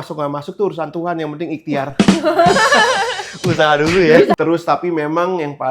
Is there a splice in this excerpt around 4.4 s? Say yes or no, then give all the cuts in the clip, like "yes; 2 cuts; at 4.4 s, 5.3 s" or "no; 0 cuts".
yes; 1 cut; at 4.4 s